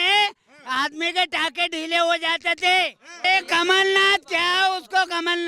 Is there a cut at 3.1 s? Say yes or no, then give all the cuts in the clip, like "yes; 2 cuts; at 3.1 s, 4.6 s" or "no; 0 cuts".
yes; 1 cut; at 3.1 s